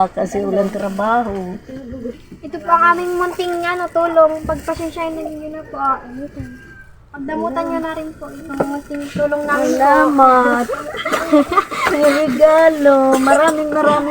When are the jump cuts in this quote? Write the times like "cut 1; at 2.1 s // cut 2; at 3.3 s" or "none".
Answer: cut 1; at 2.1 s